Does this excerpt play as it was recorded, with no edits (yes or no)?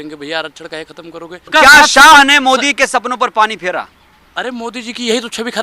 no